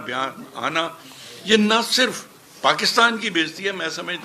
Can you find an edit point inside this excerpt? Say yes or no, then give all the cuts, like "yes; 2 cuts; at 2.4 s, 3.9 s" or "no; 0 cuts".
no; 0 cuts